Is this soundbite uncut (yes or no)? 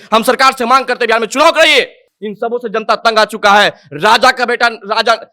yes